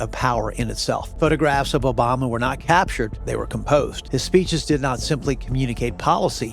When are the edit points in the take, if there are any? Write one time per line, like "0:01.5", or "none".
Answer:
0:01.1
0:03.2
0:04.0